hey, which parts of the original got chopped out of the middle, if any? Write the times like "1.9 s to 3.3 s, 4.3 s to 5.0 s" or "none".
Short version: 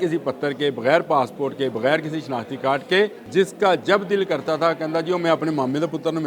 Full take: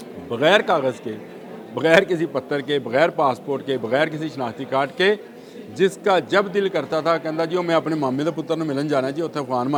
5.3 s to 5.6 s